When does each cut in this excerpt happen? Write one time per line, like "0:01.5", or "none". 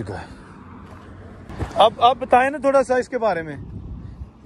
0:01.5